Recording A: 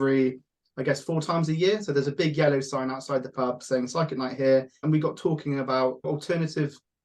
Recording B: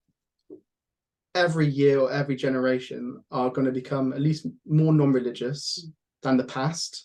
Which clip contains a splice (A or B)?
A